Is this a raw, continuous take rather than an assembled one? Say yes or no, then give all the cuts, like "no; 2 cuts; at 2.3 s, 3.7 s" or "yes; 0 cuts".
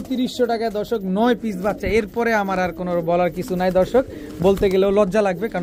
yes; 0 cuts